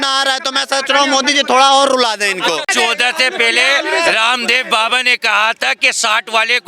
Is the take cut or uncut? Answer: cut